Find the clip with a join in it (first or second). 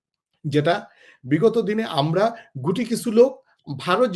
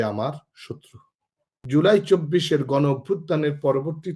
second